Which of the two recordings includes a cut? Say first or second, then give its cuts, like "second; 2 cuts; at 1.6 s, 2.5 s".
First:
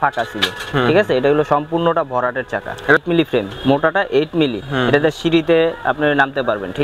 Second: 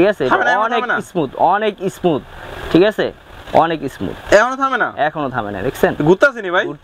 first; 1 cut; at 3.0 s